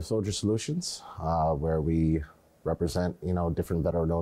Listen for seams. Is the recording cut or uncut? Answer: uncut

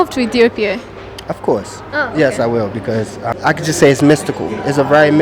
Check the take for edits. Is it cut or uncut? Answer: cut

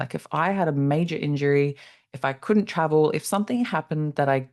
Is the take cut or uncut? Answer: uncut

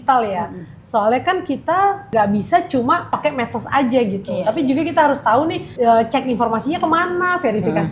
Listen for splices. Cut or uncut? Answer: cut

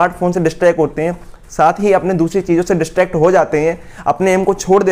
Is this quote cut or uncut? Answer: uncut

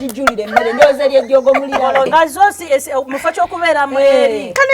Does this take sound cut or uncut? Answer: cut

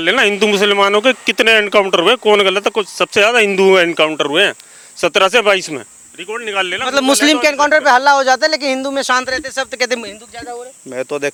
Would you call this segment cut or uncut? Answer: uncut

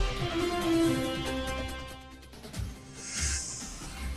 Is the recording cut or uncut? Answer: uncut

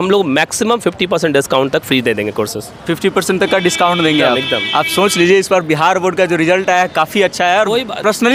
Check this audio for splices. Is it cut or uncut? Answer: uncut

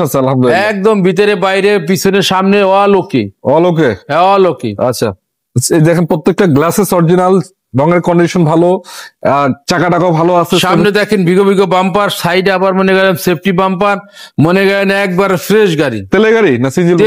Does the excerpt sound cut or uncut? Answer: uncut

